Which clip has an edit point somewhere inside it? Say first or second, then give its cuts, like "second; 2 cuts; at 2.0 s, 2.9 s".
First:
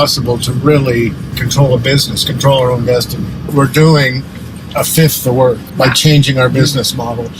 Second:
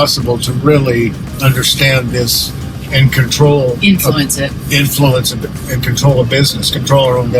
first; 3 cuts; at 1.3 s, 3.5 s, 5.7 s